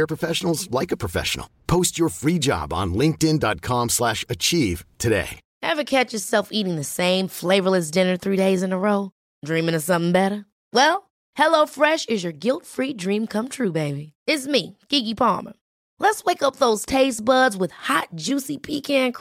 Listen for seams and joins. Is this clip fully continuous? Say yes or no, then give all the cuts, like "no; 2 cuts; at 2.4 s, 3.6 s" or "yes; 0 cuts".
no; 1 cut; at 5.4 s